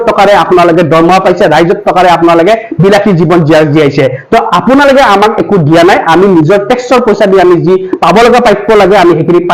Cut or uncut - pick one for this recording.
uncut